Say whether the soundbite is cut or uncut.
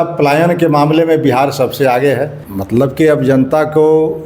cut